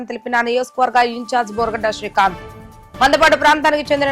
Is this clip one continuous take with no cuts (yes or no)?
yes